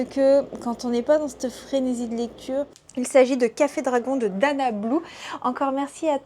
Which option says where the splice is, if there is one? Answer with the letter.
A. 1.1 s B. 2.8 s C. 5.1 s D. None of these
B